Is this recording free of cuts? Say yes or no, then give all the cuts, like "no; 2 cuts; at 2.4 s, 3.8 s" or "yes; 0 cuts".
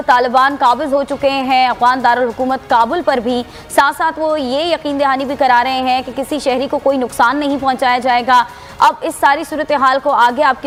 yes; 0 cuts